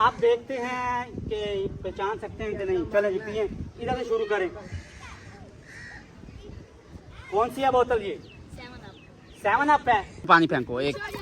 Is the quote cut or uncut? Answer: cut